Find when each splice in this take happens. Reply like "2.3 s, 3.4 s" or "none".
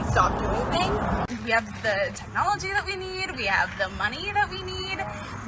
1.3 s